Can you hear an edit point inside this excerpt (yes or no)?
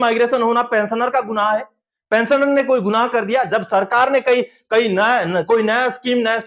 no